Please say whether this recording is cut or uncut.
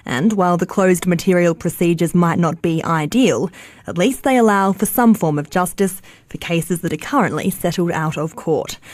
cut